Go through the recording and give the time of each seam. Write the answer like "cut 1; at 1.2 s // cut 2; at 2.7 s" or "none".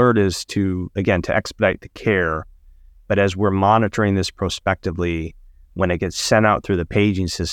none